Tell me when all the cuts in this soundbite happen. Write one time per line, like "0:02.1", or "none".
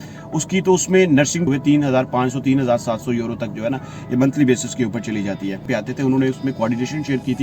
0:01.5
0:05.7